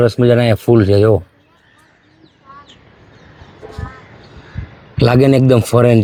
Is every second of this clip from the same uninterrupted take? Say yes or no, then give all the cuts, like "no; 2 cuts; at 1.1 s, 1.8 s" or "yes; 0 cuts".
yes; 0 cuts